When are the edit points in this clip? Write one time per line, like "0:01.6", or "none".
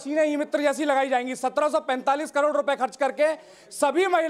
none